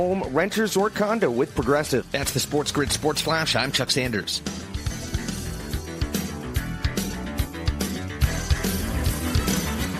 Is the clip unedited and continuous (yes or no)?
yes